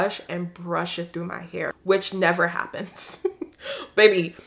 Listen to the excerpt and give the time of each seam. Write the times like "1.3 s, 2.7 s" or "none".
1.8 s

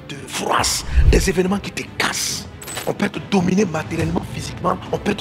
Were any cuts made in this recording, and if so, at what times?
2.7 s

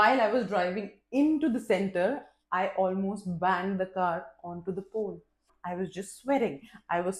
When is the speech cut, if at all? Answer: 5.6 s

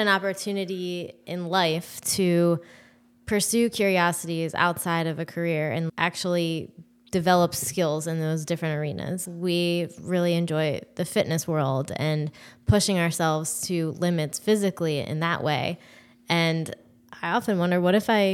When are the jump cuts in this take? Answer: 5.9 s, 9.2 s

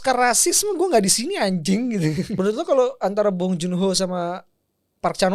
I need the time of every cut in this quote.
2.4 s

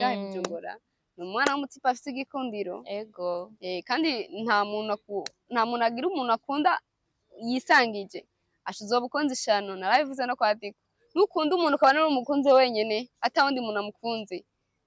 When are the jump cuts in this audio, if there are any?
none

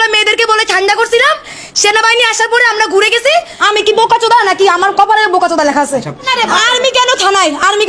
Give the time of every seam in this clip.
3.6 s, 6.2 s

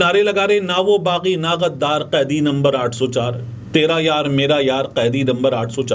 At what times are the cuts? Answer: none

